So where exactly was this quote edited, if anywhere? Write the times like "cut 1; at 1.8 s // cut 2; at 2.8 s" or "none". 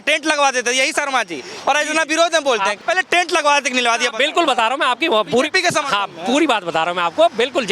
cut 1; at 2.8 s